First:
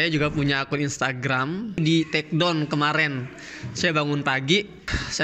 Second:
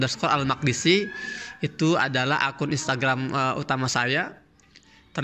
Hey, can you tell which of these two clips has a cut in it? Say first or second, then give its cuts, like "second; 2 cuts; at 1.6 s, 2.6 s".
first; 1 cut; at 1.8 s